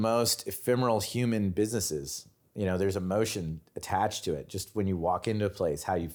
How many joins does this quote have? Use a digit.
0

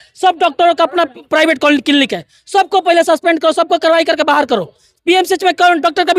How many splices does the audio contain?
0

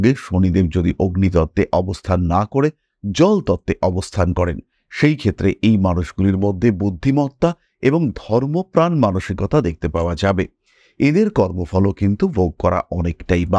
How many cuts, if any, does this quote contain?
0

